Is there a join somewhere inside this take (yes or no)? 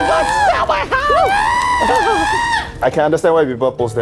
yes